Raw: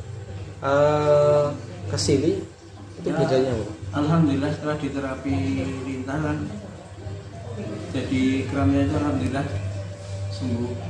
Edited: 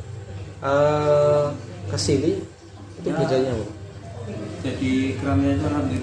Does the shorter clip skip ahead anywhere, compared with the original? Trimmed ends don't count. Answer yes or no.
yes